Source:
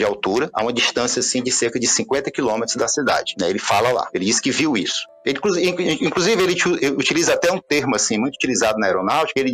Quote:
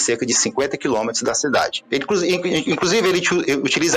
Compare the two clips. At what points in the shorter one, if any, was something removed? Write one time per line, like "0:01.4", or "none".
0:01.8